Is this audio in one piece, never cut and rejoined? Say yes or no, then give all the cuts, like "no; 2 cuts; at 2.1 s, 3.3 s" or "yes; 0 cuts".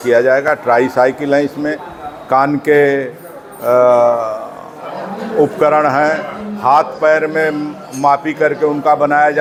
yes; 0 cuts